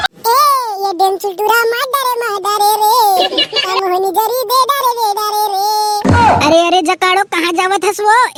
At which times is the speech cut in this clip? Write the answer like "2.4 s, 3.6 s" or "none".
none